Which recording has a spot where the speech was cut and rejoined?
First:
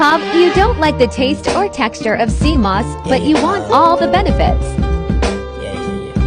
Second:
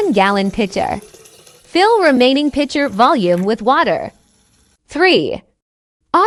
first; 1 cut; at 0.9 s

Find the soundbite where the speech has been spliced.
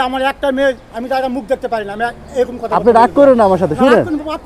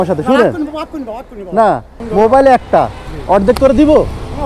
second; 1 cut; at 1.9 s

